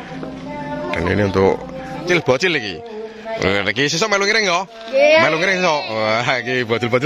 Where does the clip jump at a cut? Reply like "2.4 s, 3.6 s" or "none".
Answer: 2.0 s